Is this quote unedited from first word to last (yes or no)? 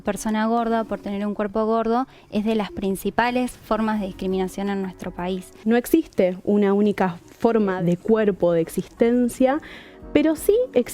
no